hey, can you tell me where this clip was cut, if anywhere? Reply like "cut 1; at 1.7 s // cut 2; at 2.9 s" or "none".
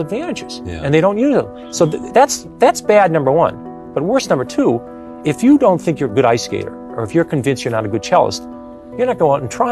none